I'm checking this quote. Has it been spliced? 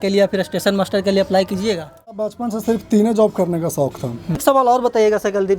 yes; 2 cuts; at 2.2 s, 4.4 s

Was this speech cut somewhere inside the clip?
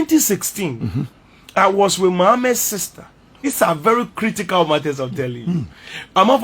yes; 1 cut; at 3.4 s

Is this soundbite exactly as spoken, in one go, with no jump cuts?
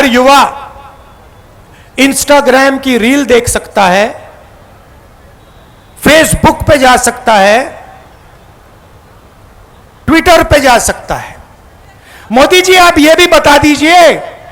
yes; 0 cuts

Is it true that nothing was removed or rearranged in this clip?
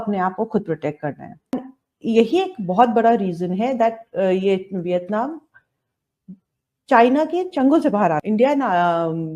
no; 2 cuts; at 5.3 s, 8.2 s

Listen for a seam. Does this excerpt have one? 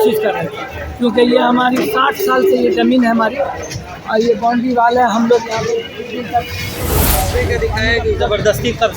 yes; 1 cut; at 7.2 s

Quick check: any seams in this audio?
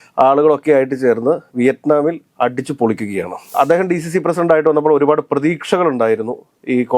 yes; 1 cut; at 3.4 s

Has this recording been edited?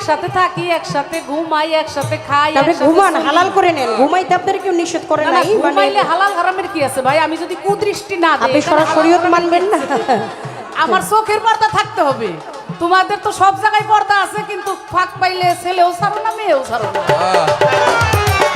no; 0 cuts

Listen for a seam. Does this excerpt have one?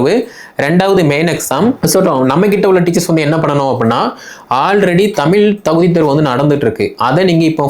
yes; 1 cut; at 1.8 s

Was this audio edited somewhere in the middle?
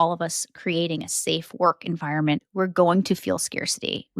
yes; 1 cut; at 2.5 s

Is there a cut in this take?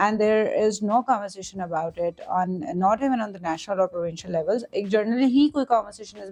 no; 0 cuts

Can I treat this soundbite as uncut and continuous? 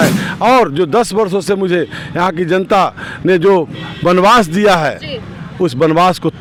yes; 0 cuts

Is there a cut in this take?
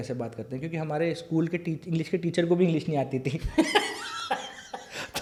no; 0 cuts

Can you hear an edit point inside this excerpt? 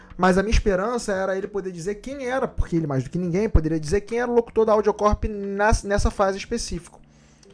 no; 0 cuts

